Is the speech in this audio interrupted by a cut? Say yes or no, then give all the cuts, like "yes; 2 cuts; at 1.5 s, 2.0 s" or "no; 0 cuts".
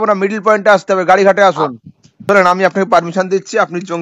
yes; 1 cut; at 2.1 s